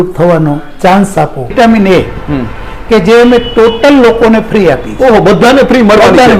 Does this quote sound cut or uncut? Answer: cut